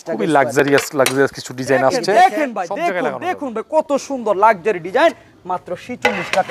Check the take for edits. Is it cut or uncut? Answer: cut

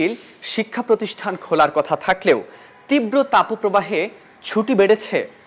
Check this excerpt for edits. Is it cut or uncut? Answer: uncut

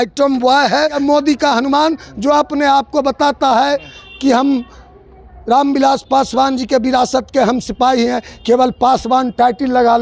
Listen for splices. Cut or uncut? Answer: cut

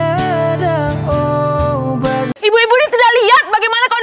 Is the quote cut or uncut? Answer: cut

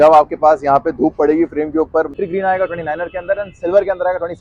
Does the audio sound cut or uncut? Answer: cut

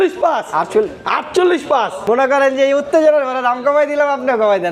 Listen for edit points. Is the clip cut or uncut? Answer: cut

